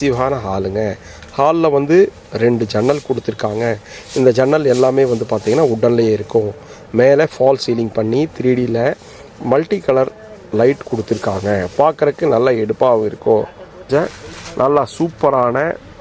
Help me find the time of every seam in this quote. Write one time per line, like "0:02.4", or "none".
0:13.9